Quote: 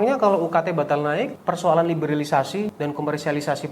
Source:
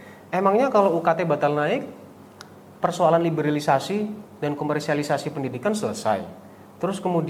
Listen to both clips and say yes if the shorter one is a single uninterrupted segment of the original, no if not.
no